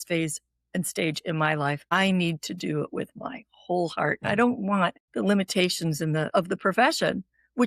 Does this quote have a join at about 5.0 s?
yes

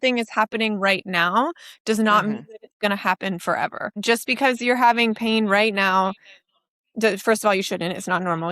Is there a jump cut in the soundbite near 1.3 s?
no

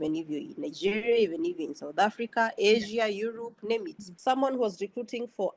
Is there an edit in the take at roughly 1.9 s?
no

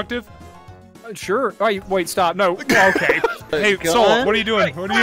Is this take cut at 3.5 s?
yes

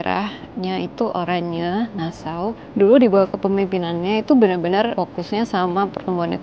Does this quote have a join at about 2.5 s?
yes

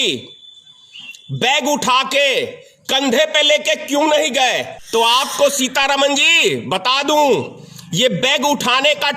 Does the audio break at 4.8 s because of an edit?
yes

